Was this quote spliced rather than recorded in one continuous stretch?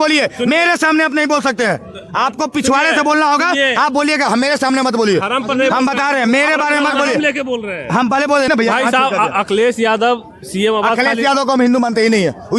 yes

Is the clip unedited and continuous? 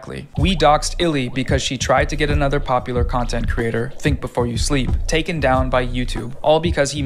yes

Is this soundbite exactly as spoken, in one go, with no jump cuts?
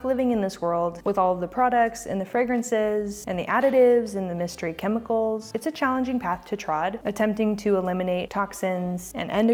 yes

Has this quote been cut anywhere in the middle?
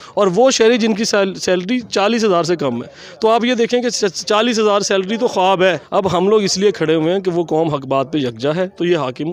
yes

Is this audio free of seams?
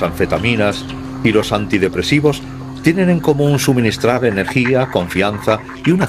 yes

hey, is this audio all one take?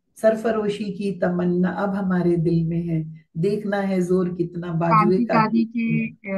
yes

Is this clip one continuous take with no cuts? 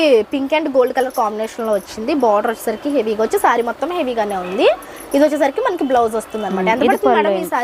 yes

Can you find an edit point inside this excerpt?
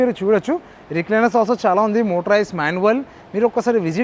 no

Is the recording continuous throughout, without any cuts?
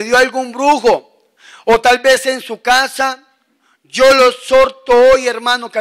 yes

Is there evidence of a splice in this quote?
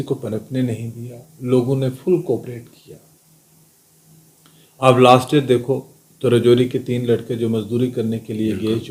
no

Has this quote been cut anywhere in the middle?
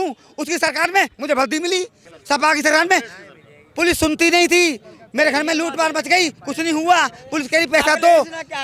yes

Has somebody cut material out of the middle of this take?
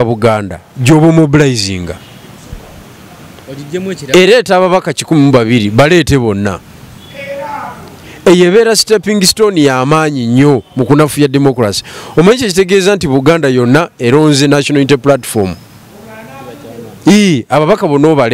no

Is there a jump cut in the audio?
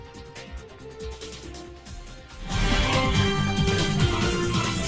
no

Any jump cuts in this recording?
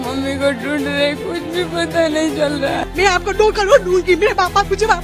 no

